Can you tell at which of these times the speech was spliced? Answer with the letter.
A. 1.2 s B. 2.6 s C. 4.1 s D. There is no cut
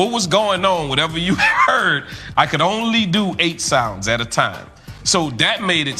D